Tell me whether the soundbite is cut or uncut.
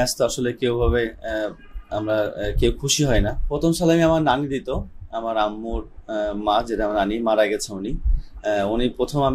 cut